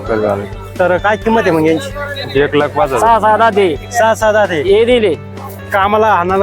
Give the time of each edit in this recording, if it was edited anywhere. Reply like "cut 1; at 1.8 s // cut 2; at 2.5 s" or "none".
cut 1; at 3.0 s